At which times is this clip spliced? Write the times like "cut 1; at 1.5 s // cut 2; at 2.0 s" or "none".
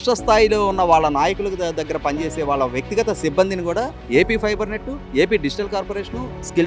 none